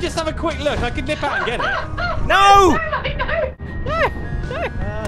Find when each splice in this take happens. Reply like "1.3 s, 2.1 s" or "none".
3.7 s